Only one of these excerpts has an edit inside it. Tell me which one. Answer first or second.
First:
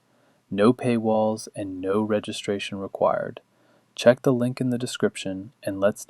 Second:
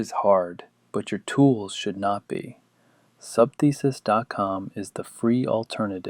first